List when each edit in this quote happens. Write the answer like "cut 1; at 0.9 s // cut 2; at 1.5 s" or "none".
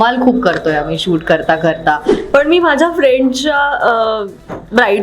cut 1; at 2.1 s

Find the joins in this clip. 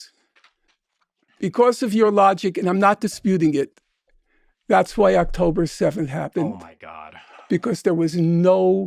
none

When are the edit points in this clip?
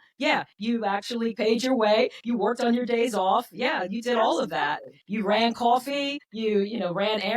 cut 1; at 1.4 s // cut 2; at 6.2 s

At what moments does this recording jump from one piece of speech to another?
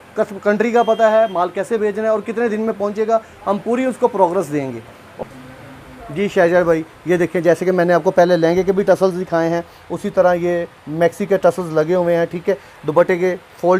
none

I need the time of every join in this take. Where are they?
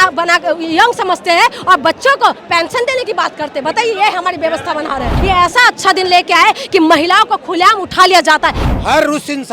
cut 1; at 5.1 s // cut 2; at 8.6 s

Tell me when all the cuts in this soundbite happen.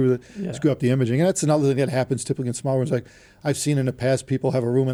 none

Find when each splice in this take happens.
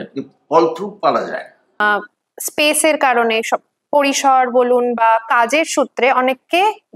cut 1; at 1.8 s

